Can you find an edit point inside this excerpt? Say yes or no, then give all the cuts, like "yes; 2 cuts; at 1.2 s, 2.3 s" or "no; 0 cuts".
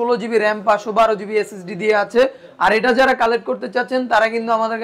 no; 0 cuts